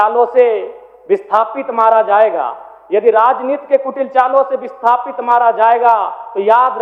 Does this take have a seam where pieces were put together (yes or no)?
no